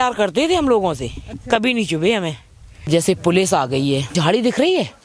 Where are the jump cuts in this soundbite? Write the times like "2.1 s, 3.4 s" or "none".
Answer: 2.9 s, 4.1 s